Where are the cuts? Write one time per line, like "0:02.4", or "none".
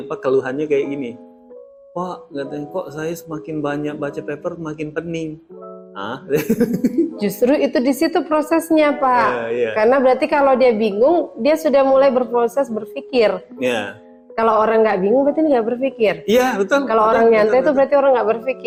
none